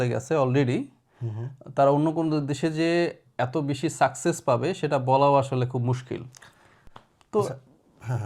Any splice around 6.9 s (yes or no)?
no